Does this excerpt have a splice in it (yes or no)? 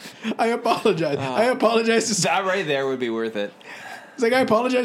no